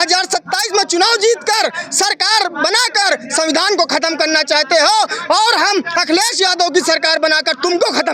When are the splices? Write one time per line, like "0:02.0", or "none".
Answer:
none